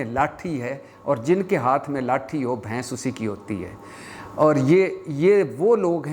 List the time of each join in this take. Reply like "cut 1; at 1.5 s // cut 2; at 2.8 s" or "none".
none